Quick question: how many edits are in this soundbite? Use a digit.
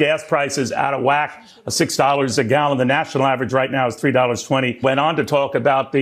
1